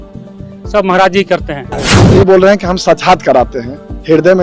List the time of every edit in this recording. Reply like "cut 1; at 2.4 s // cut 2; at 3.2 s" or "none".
cut 1; at 2.0 s